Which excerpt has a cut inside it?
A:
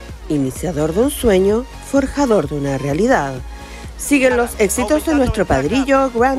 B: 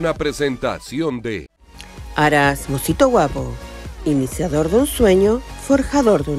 B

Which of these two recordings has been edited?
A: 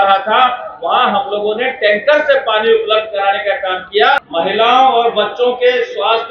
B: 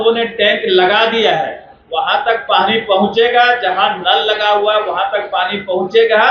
A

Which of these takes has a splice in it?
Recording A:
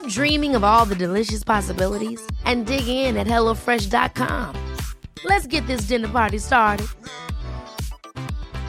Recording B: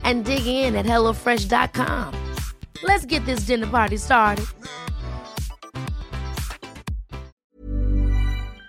B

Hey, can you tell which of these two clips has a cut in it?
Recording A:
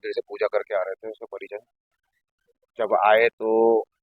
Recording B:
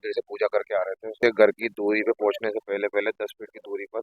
B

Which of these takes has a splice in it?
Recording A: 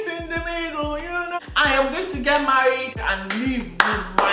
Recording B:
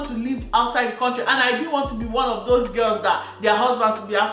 A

